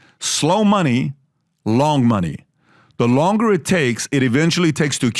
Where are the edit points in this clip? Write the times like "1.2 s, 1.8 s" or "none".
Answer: none